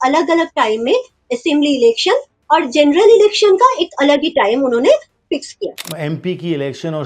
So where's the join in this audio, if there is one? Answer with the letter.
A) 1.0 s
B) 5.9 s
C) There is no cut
B